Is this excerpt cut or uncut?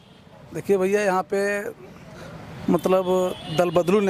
uncut